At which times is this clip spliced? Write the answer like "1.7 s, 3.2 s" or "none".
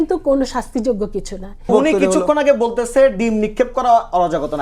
1.7 s

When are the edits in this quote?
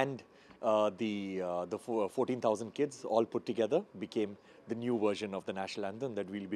none

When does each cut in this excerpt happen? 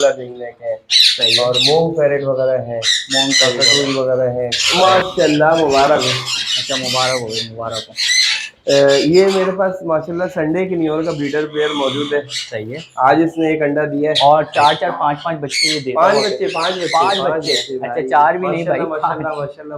4.6 s, 14.2 s

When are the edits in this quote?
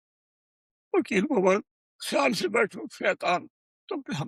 none

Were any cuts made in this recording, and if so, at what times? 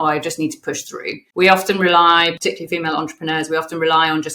1.2 s, 2.4 s

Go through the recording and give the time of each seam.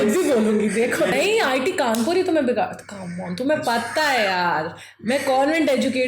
1.1 s

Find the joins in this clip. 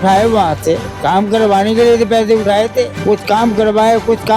0.9 s, 3.0 s

